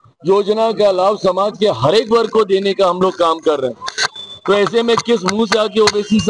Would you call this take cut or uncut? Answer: uncut